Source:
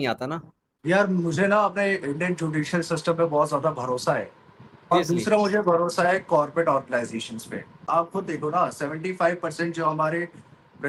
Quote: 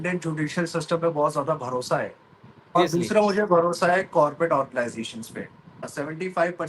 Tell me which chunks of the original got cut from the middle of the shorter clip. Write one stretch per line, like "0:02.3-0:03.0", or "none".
0:07.9-0:08.6